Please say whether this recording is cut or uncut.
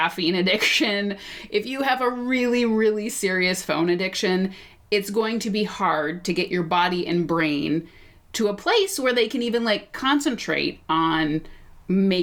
uncut